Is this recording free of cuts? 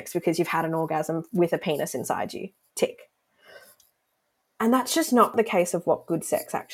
no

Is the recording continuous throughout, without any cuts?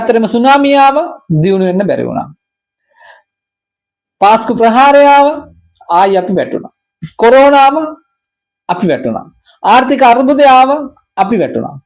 yes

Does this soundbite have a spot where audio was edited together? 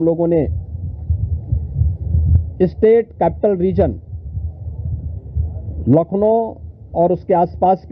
no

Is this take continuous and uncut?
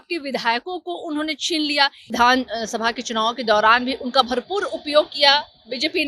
no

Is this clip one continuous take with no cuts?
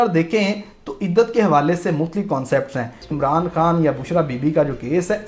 no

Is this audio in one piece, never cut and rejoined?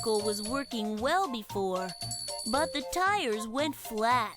yes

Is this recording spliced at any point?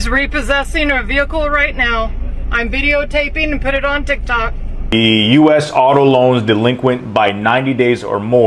yes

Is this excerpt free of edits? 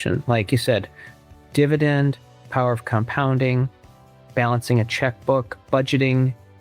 yes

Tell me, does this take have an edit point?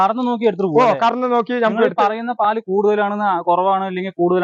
no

